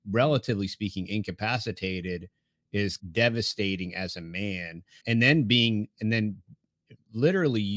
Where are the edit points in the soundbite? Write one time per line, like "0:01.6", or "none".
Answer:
0:03.0
0:05.0